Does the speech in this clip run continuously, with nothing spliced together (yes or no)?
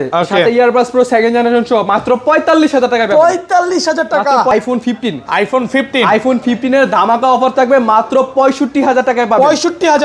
no